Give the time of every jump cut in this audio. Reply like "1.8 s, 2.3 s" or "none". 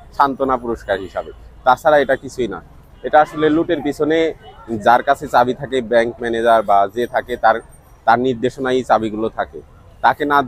none